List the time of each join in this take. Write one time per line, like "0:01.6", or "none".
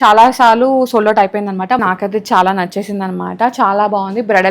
0:01.8